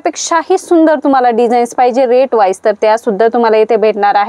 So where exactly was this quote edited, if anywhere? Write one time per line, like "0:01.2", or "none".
none